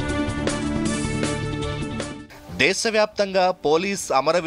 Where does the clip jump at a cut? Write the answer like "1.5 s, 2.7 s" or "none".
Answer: 1.9 s